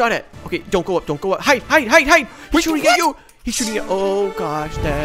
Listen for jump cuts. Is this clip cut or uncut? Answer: uncut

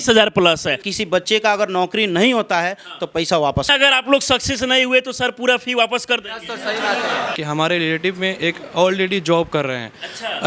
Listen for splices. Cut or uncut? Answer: cut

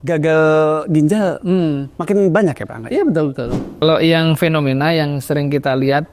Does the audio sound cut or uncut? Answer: cut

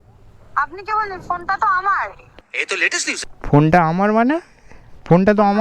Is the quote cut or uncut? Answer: uncut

